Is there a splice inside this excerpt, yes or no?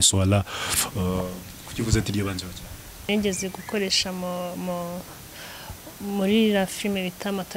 yes